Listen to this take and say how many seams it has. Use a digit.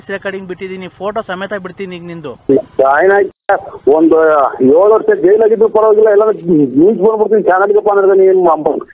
1